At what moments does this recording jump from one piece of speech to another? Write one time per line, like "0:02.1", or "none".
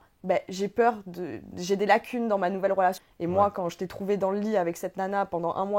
0:03.0